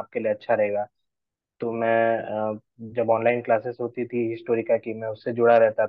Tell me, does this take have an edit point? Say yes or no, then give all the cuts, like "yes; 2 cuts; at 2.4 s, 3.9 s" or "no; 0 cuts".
no; 0 cuts